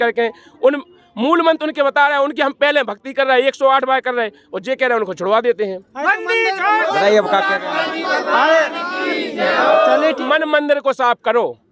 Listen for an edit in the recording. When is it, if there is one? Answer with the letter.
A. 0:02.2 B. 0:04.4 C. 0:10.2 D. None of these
C